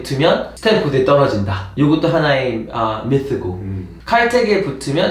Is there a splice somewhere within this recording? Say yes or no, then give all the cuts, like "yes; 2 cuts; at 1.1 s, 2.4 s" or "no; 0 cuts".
no; 0 cuts